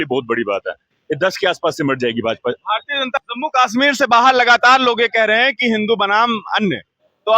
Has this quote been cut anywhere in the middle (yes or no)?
yes